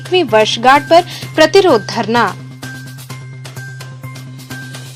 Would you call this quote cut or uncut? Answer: uncut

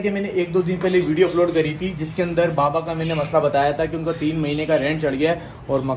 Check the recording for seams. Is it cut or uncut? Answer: uncut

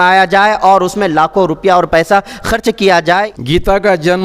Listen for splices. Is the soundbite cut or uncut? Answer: cut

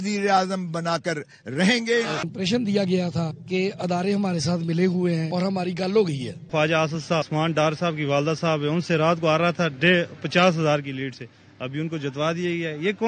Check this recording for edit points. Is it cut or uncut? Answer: cut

